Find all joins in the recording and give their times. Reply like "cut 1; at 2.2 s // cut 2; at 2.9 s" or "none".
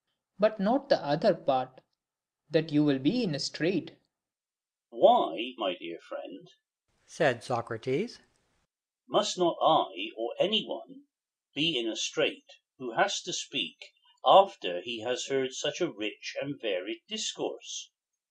cut 1; at 3.4 s